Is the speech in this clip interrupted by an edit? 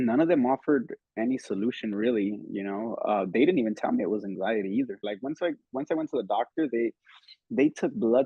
yes; 1 cut; at 5.0 s

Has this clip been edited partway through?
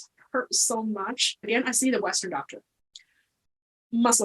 yes; 1 cut; at 1.4 s

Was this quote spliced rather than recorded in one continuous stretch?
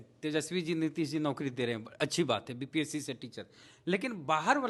no; 0 cuts

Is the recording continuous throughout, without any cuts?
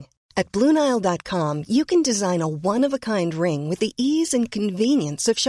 yes; 0 cuts

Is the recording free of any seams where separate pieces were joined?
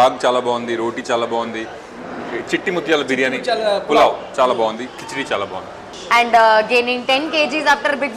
no; 1 cut; at 5.9 s

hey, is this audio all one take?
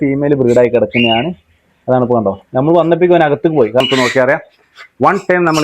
no; 1 cut; at 3.9 s

